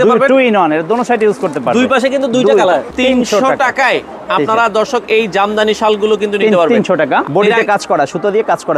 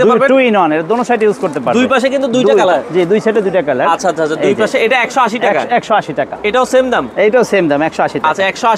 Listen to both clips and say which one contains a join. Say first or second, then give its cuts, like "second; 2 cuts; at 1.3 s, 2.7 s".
first; 2 cuts; at 2.9 s, 7.3 s